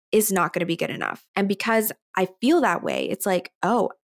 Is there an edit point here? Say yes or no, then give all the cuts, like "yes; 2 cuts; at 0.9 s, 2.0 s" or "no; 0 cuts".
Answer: no; 0 cuts